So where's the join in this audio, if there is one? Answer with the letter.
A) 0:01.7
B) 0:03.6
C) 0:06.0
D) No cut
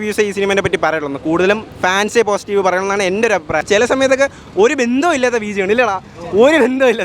B